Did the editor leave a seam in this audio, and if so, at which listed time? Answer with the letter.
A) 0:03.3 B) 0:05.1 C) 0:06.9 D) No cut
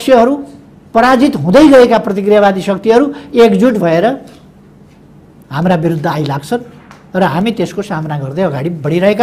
D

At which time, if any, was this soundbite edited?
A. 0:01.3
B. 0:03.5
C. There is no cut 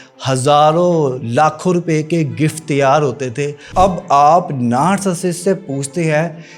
B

